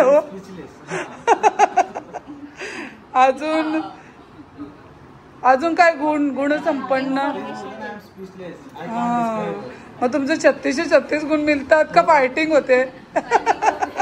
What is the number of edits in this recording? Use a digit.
0